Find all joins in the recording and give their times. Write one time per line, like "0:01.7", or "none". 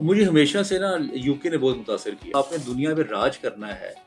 0:02.3